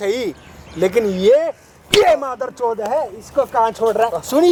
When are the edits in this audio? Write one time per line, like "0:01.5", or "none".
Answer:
none